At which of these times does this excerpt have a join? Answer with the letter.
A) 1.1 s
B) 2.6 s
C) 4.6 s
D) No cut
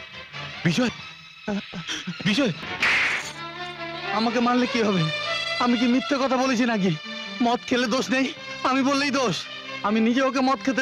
B